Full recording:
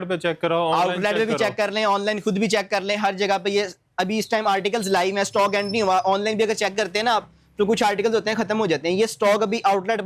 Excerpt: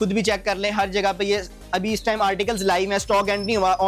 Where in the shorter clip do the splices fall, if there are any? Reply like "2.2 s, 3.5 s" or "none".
none